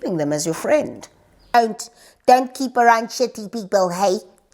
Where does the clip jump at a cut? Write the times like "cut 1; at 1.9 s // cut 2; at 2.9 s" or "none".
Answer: cut 1; at 1.4 s